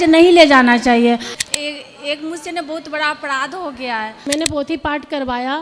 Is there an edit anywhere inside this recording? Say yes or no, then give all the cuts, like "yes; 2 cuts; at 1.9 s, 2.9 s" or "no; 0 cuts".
yes; 2 cuts; at 1.3 s, 4.3 s